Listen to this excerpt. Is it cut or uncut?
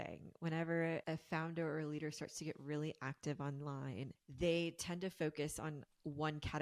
cut